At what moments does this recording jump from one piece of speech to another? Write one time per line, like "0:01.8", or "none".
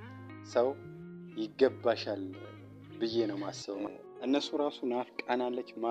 0:03.8

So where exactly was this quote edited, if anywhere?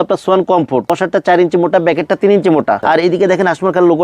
0:00.9
0:02.8

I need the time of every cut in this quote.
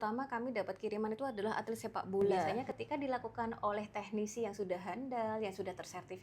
0:02.5

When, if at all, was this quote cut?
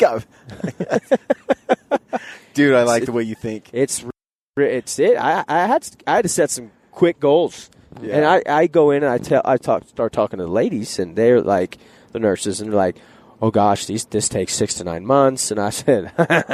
none

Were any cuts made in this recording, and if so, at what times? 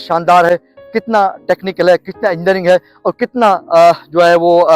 none

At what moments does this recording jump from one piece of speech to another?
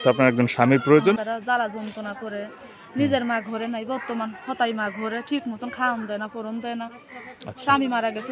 0:01.2

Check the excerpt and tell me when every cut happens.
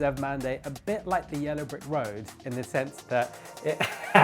none

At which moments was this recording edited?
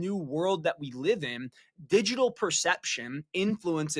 none

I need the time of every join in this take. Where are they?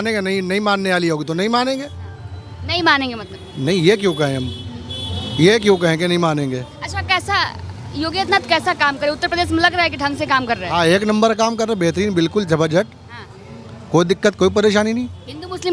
none

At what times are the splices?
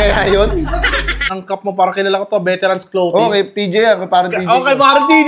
0:01.3

